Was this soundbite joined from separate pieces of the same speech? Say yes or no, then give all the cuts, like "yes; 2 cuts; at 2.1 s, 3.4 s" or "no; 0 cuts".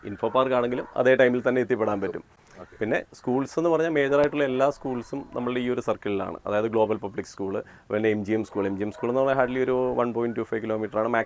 no; 0 cuts